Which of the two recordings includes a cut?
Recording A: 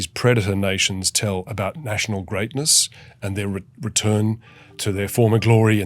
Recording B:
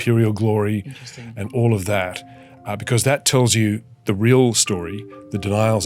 A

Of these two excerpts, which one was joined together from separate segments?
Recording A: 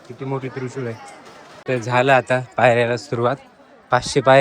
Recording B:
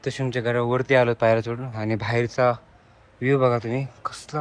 A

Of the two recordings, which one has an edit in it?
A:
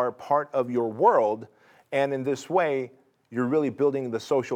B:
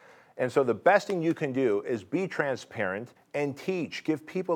B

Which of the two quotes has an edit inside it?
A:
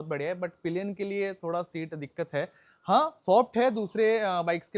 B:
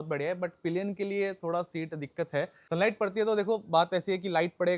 B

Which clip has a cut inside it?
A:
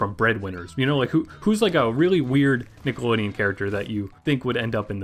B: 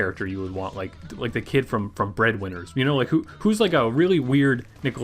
B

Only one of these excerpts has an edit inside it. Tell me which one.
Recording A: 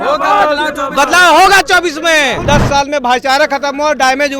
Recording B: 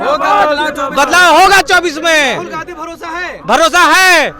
A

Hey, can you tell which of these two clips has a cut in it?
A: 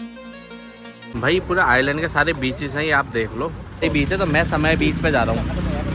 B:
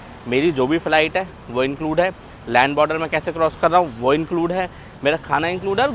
A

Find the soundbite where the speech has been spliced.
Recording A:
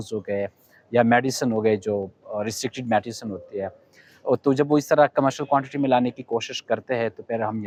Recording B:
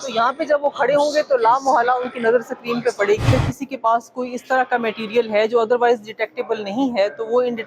B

